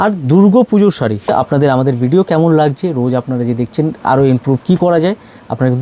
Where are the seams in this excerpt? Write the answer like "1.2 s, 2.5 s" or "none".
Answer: 1.3 s